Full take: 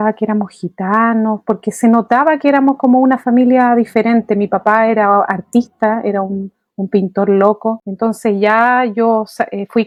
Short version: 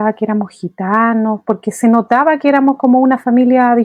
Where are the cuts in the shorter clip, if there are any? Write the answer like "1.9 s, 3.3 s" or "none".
none